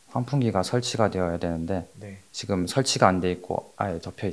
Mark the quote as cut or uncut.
uncut